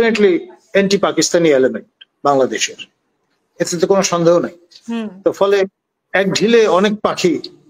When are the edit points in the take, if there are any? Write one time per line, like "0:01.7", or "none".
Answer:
none